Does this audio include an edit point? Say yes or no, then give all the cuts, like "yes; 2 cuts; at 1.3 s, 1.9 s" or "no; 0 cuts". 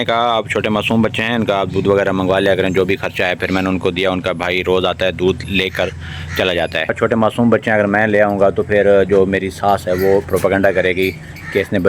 yes; 1 cut; at 7.0 s